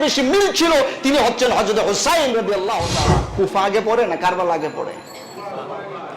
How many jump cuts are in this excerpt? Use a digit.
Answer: 1